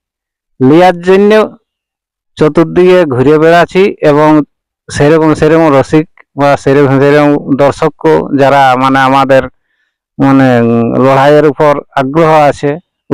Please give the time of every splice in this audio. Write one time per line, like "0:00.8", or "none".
none